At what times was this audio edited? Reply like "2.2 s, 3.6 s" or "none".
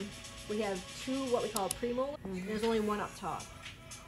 2.3 s